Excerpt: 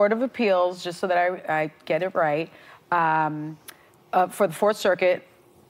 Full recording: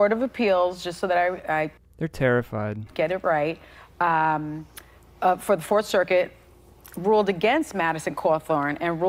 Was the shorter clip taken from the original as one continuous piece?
no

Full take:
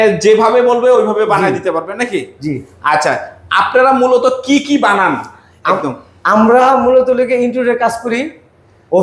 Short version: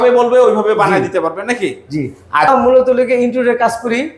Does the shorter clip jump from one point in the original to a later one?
yes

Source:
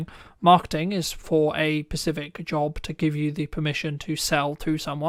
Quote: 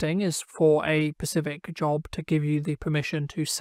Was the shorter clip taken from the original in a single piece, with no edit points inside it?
yes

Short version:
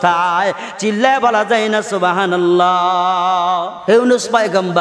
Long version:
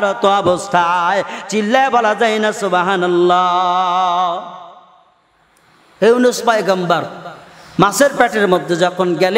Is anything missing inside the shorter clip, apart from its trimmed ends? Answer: yes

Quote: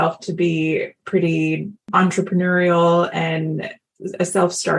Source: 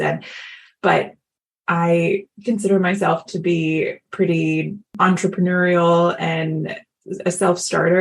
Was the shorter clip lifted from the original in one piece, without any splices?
yes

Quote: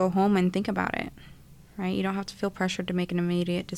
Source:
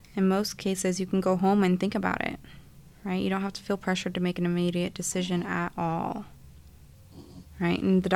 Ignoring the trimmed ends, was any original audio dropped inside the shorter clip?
no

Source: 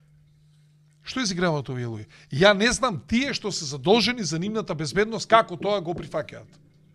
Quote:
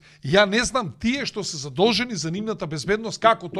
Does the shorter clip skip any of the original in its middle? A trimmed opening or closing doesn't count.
no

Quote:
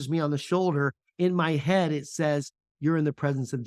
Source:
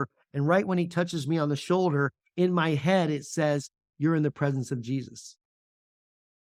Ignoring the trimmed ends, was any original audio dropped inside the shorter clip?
no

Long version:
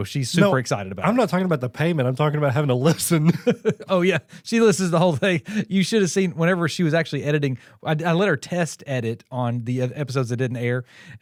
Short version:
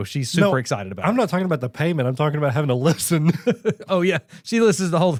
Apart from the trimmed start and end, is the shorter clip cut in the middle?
no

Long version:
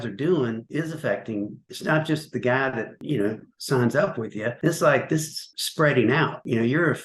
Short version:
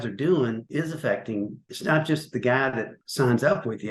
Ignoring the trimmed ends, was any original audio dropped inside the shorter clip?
yes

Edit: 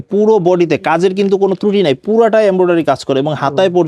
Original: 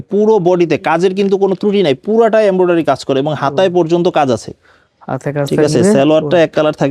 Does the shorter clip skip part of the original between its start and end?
no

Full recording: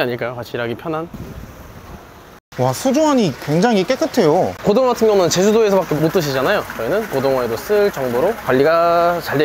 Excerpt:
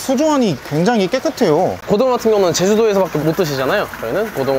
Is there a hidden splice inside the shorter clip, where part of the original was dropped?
no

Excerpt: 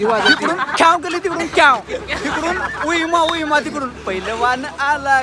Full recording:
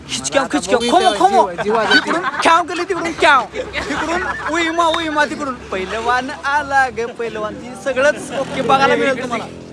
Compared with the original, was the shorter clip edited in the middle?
no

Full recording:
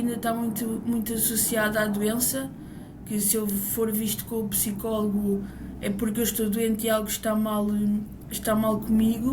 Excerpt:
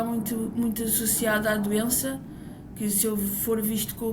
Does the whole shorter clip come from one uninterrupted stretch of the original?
yes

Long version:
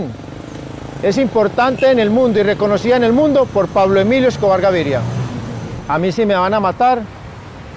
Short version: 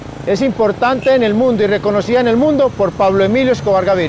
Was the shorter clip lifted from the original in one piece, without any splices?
yes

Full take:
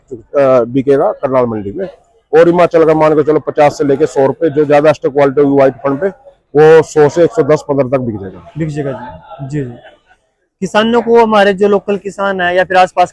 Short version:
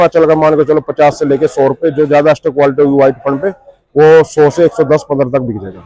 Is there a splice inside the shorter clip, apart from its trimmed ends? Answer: no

